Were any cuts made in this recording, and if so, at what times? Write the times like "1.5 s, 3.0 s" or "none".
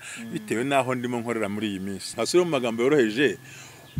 2.1 s